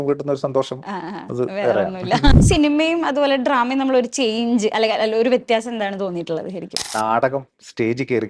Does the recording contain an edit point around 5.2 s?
no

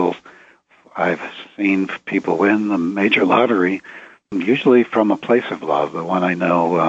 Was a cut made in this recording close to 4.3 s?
yes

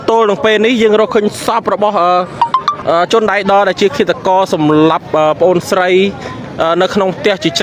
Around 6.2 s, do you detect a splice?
no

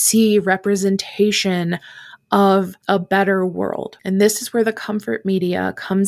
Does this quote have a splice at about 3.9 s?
yes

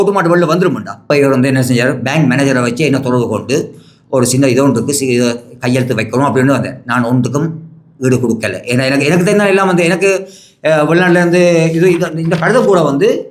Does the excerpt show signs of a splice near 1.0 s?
yes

